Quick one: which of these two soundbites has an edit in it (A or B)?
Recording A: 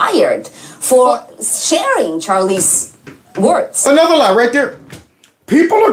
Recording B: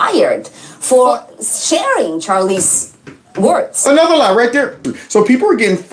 B